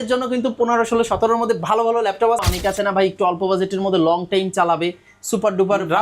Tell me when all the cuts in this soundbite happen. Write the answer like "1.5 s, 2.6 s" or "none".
2.4 s